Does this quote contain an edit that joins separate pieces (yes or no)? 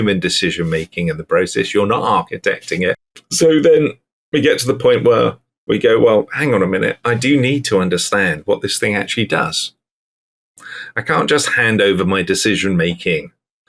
yes